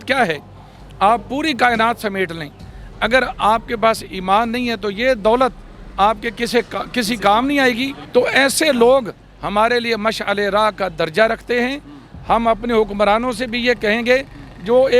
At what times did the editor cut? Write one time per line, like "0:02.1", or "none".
0:07.9